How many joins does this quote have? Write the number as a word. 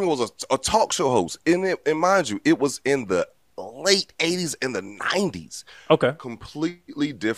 zero